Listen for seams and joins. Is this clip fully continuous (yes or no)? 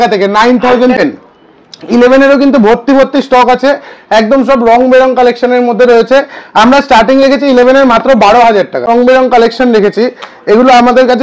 no